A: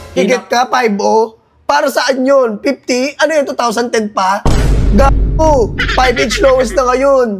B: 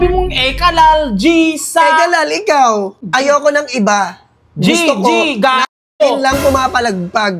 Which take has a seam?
B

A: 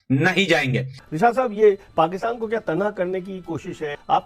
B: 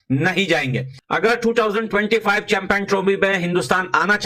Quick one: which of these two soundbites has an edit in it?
A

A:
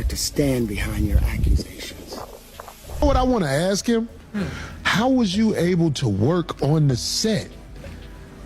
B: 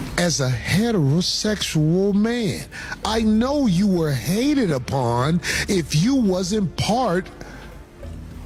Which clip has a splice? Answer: A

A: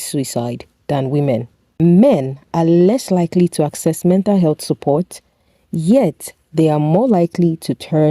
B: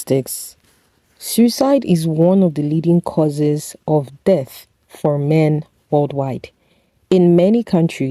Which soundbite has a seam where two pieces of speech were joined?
A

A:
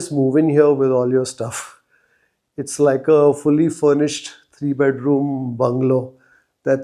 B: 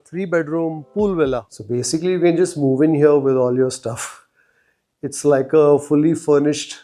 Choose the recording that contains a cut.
B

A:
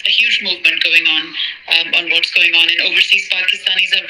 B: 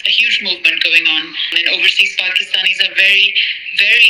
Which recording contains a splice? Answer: B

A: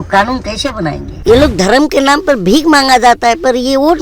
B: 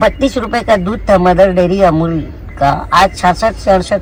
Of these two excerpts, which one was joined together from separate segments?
A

